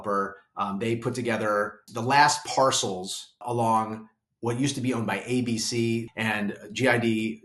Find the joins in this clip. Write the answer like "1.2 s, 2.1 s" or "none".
1.9 s, 3.4 s, 6.1 s